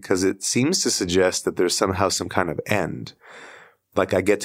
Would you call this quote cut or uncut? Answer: uncut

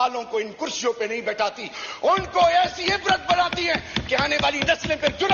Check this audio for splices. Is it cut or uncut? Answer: uncut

